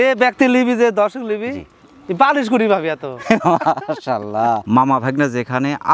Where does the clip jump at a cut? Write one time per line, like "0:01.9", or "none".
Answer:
0:04.6